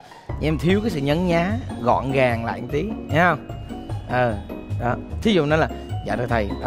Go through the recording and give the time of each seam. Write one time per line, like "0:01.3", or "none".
none